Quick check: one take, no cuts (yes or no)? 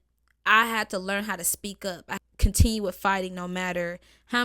no